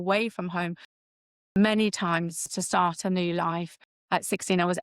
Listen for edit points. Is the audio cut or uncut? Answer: cut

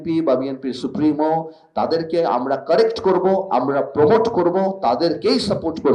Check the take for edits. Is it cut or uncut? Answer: uncut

